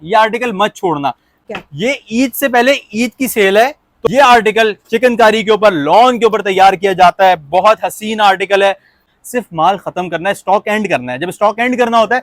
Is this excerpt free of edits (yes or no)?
no